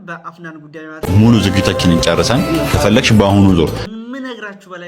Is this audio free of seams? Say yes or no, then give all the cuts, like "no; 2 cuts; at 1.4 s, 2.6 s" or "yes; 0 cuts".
no; 2 cuts; at 1.1 s, 3.8 s